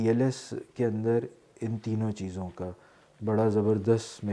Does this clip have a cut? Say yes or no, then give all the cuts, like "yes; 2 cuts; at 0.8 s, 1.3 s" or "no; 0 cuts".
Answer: no; 0 cuts